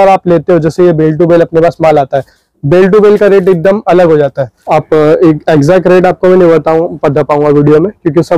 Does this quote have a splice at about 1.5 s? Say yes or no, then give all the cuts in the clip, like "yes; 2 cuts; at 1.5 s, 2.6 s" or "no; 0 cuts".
no; 1 cut; at 4.5 s